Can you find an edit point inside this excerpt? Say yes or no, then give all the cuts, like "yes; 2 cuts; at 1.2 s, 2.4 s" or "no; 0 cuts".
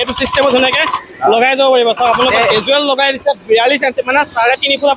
no; 0 cuts